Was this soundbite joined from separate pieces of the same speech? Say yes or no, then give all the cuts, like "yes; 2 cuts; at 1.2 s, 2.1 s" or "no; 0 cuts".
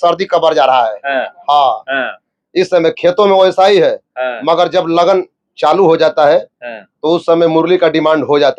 no; 0 cuts